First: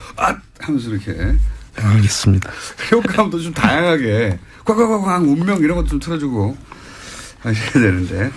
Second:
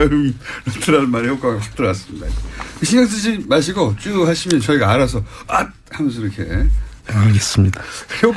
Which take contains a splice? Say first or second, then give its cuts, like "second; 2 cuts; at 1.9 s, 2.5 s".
second; 1 cut; at 1.3 s